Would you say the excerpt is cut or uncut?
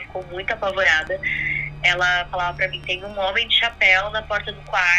uncut